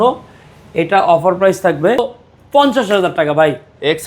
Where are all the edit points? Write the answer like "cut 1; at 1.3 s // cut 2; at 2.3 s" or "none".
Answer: cut 1; at 2.0 s